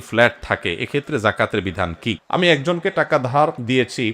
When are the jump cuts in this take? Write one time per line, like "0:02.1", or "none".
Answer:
0:02.2